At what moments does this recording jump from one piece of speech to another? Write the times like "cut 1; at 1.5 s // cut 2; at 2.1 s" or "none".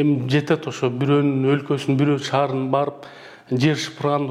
none

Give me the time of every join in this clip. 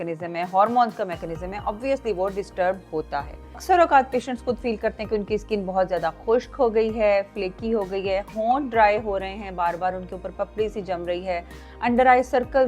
cut 1; at 3.6 s

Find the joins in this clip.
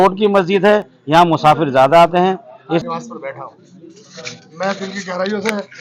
cut 1; at 2.8 s

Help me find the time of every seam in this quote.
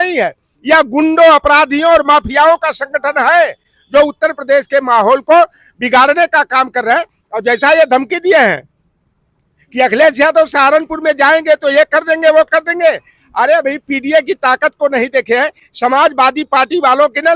none

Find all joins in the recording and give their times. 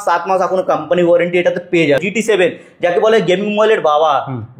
cut 1; at 2.0 s

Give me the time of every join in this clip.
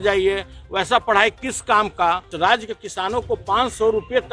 cut 1; at 2.3 s

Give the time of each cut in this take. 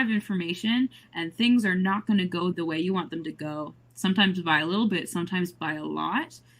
cut 1; at 2.4 s

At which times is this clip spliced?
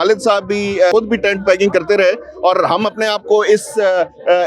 cut 1; at 0.9 s

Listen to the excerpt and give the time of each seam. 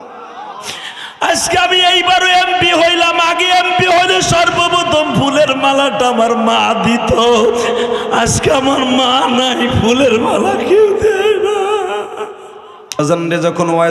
cut 1; at 13.0 s

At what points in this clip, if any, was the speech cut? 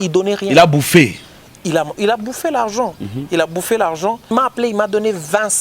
cut 1; at 4.3 s

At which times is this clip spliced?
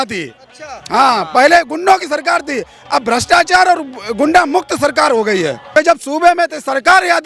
cut 1; at 5.6 s

